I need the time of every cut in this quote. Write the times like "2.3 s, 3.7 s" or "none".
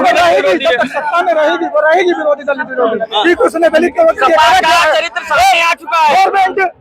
none